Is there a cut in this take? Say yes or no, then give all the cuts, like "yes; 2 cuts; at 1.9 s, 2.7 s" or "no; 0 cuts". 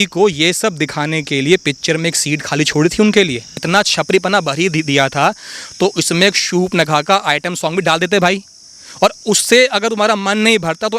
yes; 1 cut; at 3.6 s